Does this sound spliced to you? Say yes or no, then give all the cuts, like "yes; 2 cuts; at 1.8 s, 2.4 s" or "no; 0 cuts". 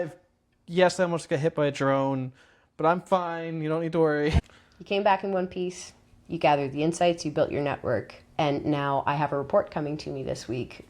yes; 1 cut; at 4.4 s